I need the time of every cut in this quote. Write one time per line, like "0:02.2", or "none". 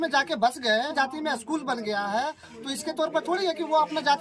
0:00.9